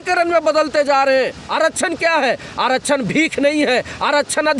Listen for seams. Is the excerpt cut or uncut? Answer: cut